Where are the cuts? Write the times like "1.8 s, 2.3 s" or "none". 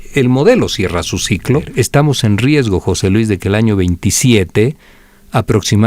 1.7 s